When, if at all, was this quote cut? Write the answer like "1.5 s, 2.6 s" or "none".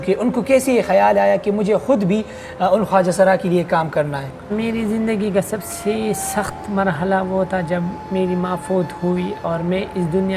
4.5 s